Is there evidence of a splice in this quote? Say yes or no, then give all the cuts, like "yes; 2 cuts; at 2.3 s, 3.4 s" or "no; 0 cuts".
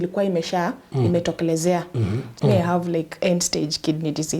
yes; 1 cut; at 2.3 s